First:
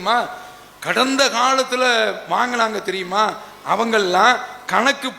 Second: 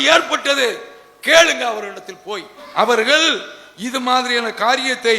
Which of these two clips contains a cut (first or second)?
second